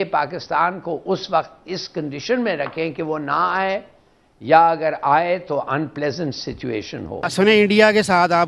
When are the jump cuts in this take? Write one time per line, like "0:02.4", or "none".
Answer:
0:07.3